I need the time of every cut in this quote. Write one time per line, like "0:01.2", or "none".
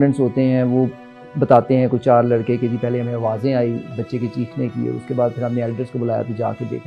none